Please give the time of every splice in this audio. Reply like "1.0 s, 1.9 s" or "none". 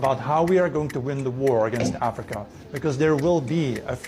2.6 s

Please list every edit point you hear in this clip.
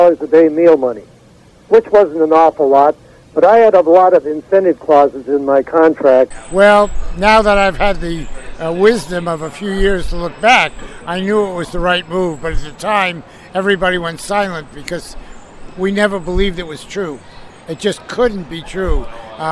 6.3 s

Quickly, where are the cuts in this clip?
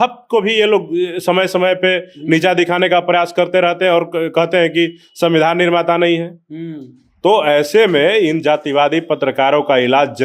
none

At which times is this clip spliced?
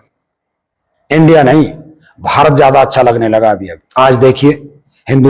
3.8 s

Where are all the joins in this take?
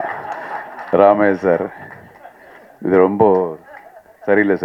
none

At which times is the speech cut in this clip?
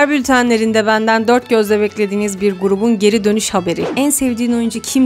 3.9 s

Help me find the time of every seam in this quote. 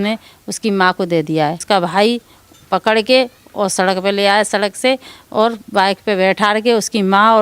1.6 s

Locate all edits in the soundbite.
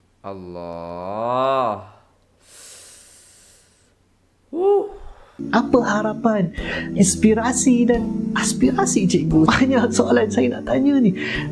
5.4 s

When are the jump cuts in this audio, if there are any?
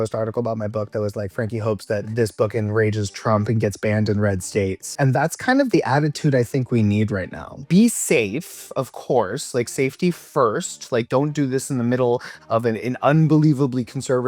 2.1 s, 4.9 s, 7.6 s

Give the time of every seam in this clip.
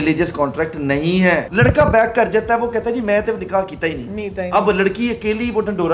1.5 s

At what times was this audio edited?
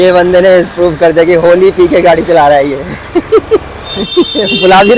none

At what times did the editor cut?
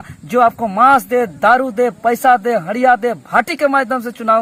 none

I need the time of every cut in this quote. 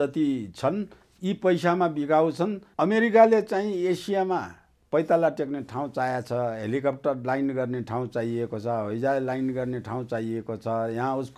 2.6 s

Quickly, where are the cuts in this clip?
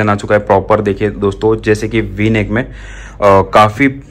none

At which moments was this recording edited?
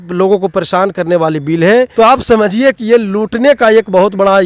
1.9 s

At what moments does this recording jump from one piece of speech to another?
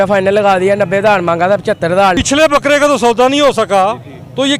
2.2 s

